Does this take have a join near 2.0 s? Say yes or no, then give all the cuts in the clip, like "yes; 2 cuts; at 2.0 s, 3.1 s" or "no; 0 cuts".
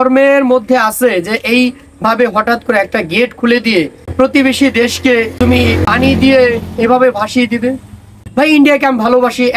no; 3 cuts; at 4.0 s, 5.5 s, 8.2 s